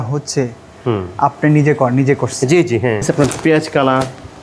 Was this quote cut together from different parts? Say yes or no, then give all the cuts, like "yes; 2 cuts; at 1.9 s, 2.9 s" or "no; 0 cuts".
yes; 1 cut; at 3.1 s